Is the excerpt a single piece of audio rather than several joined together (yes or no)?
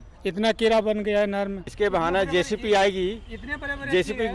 no